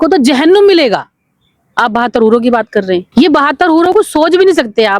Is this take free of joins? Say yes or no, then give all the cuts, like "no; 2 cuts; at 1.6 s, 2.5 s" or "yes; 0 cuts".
no; 1 cut; at 3.1 s